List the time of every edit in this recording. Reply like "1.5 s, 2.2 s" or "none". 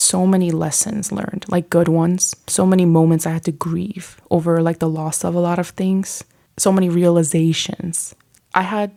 none